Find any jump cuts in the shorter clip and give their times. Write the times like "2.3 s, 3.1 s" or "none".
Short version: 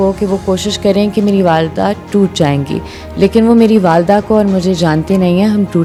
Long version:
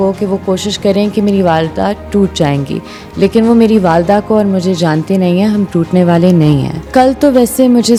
none